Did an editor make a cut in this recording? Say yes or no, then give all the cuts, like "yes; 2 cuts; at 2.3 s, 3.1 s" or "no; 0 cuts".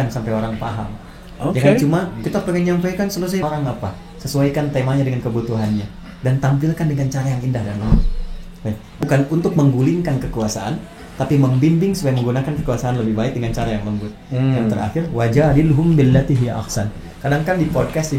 yes; 2 cuts; at 3.4 s, 9.0 s